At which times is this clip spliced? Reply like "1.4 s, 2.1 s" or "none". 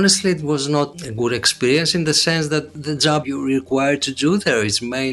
1.0 s, 2.8 s